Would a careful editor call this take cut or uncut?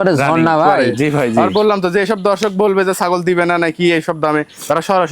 cut